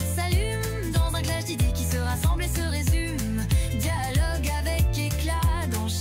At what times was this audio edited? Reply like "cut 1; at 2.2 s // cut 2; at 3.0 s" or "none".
none

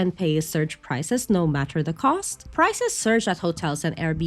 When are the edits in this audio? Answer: cut 1; at 2.4 s

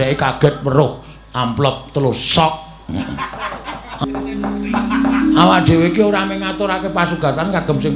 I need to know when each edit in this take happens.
cut 1; at 4.0 s

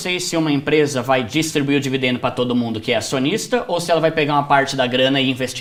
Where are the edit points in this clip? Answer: none

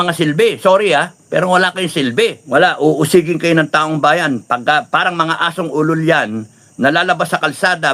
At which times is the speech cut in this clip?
cut 1; at 2.5 s

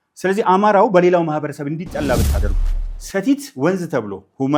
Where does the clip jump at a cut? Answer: cut 1; at 2.5 s

